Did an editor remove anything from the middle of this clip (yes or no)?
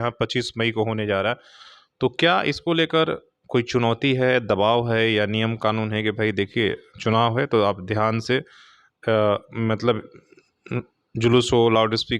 no